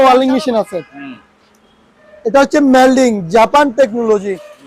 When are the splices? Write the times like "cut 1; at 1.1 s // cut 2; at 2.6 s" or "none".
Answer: none